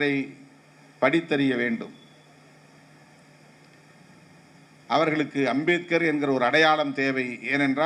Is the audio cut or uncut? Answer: uncut